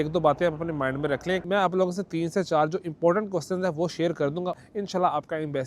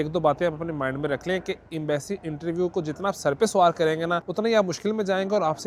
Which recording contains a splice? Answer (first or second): first